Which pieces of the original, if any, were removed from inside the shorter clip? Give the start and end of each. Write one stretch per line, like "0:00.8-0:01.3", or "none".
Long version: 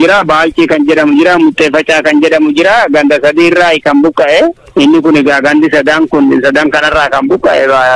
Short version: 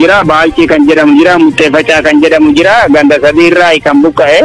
none